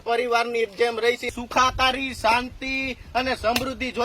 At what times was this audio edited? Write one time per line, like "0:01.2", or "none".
0:01.4